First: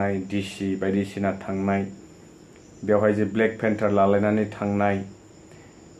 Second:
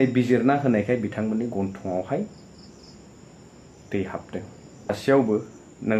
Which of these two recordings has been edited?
second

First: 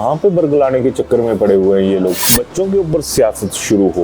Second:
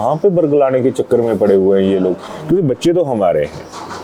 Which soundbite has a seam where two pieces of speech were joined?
first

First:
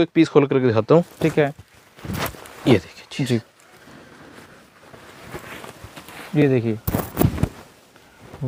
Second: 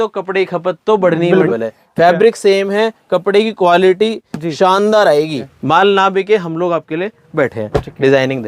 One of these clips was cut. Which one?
second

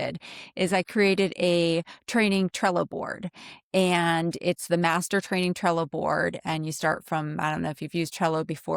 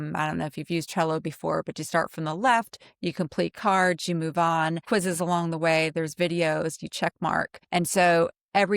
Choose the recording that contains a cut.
second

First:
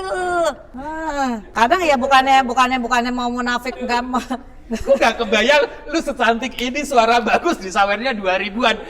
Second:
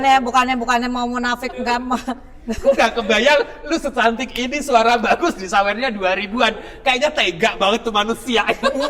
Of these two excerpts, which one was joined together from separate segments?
first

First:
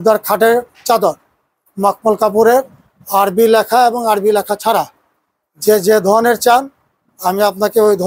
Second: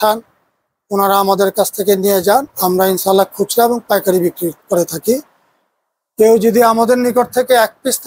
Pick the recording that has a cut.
second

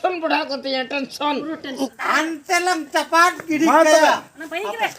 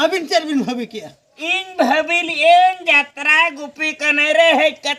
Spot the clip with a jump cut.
first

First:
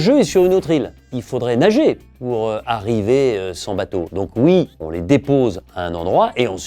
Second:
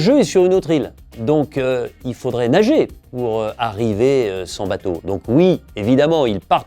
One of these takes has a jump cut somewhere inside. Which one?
first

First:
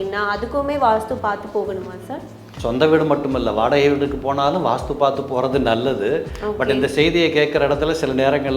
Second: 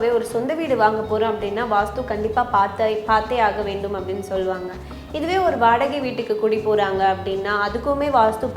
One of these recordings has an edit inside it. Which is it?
first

